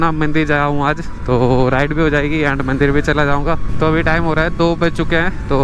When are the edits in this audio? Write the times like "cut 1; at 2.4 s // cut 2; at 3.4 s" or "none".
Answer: none